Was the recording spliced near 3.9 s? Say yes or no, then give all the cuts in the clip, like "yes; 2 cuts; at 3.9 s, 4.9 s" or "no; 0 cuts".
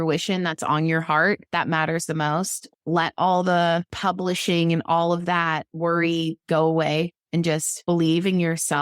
yes; 2 cuts; at 2.7 s, 3.9 s